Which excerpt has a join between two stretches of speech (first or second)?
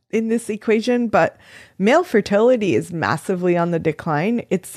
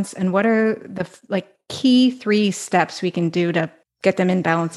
second